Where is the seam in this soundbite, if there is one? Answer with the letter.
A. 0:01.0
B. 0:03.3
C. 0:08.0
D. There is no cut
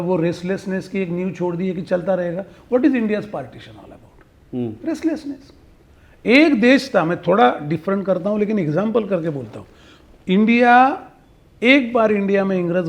D